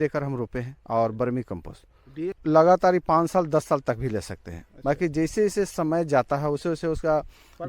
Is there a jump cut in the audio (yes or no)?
yes